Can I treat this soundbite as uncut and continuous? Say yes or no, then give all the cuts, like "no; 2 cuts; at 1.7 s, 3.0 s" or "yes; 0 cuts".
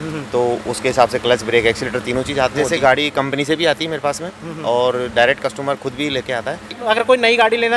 no; 2 cuts; at 2.6 s, 6.8 s